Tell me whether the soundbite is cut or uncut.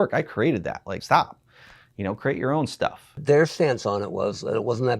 cut